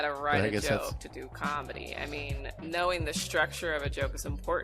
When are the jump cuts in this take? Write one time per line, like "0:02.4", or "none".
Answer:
0:02.5

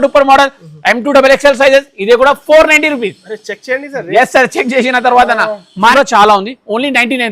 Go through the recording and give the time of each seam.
0:05.9

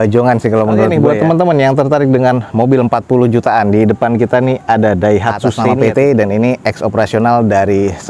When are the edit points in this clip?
0:00.9
0:05.6

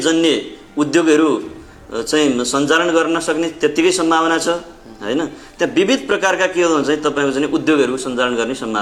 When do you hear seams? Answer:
none

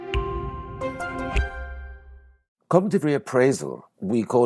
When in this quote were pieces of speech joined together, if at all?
0:02.6

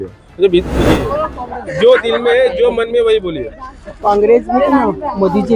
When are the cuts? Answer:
0:00.9

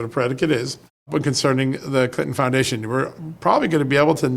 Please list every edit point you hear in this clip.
0:01.1

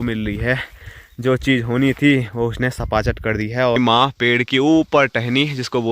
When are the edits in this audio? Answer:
0:03.8

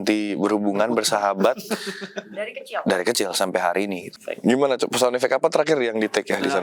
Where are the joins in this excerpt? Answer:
0:04.1

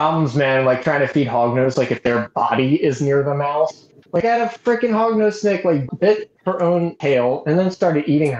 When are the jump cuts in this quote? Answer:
0:05.8
0:06.9

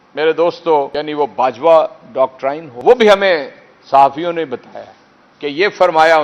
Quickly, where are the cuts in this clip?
0:00.9
0:02.9

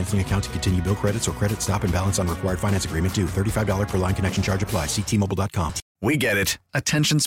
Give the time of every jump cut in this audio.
0:05.8

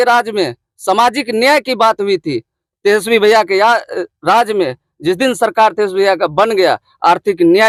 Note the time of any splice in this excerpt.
none

